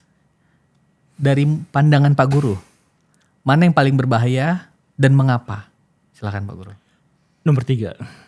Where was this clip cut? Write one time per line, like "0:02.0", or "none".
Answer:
none